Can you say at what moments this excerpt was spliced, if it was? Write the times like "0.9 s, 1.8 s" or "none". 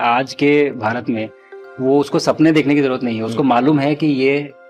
none